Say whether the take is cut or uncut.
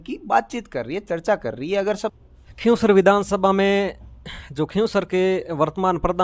cut